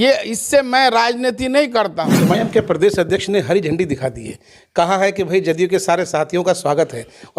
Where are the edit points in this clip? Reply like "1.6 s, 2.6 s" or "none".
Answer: 2.2 s